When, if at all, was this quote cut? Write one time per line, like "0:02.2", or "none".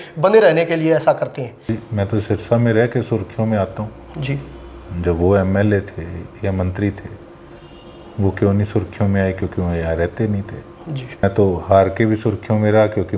0:01.7
0:11.2